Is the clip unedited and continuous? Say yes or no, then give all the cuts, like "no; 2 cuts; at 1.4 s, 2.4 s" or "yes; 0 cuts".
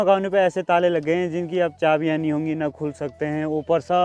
yes; 0 cuts